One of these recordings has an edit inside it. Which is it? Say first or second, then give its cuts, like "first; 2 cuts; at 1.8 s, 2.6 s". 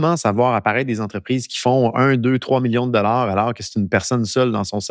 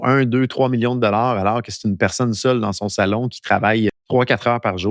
second; 1 cut; at 4.0 s